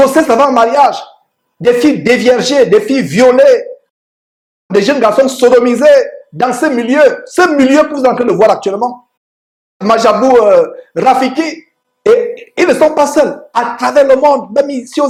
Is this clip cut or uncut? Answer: uncut